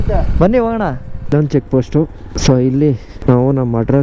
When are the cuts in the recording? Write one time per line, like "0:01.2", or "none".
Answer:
0:01.3
0:02.3
0:03.1